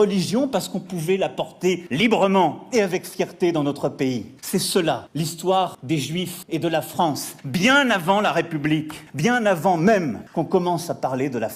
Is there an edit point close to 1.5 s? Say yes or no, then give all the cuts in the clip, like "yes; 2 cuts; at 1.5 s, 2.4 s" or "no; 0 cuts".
no; 0 cuts